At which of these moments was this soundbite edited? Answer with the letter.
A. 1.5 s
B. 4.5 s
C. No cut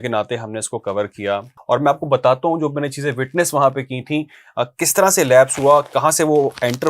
A